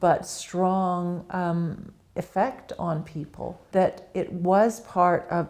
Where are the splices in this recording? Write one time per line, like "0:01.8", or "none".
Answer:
0:03.6